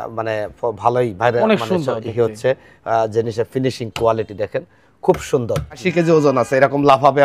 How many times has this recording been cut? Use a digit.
1